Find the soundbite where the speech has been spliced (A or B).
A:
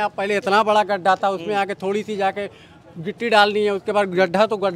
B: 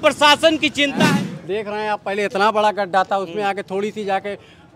B